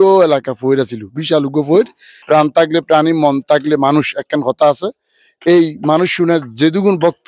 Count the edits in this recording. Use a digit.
1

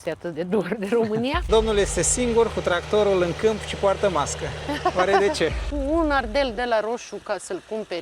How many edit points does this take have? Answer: 2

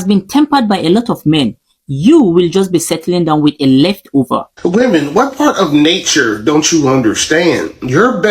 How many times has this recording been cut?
1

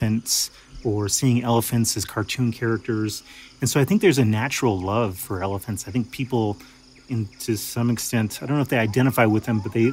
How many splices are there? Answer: 0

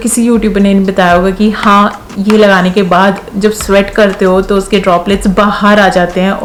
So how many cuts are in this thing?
0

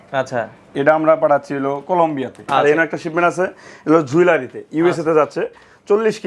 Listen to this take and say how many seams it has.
1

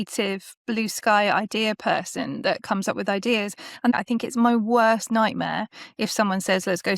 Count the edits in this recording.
1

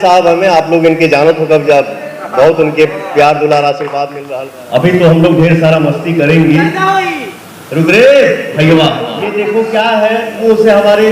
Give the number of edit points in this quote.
2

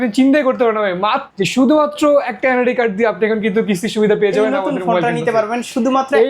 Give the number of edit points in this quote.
1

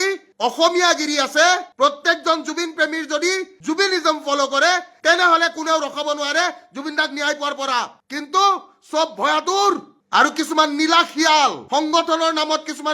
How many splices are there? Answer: 0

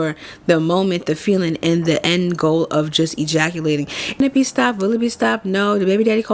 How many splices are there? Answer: 1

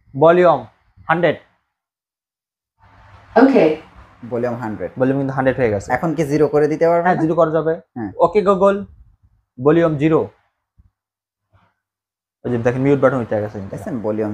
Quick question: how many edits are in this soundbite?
0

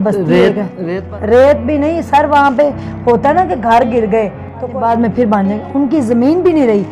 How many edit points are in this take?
2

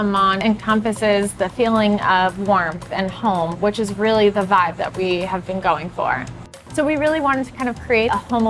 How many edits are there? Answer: 1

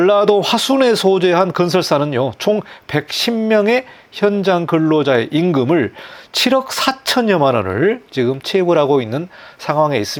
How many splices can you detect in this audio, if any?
0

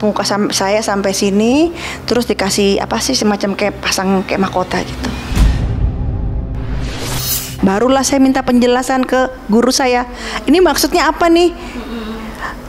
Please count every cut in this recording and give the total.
1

